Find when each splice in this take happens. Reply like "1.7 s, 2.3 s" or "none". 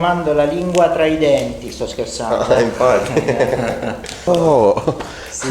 4.2 s